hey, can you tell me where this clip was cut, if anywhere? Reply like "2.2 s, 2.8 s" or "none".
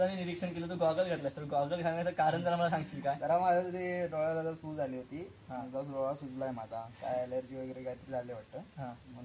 none

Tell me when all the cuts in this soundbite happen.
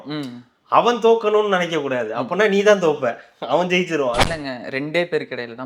4.3 s

